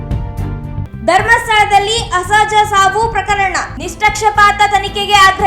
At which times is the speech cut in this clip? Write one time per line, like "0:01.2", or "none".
0:00.9